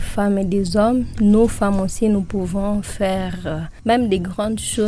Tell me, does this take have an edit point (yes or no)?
no